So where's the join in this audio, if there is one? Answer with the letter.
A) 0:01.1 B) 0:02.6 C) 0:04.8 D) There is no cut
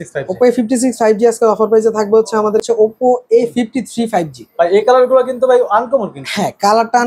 B